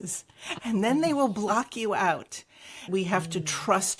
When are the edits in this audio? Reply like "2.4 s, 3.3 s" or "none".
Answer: 2.9 s